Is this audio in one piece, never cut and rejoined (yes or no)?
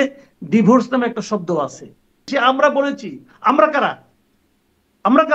no